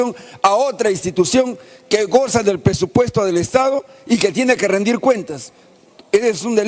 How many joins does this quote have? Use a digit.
0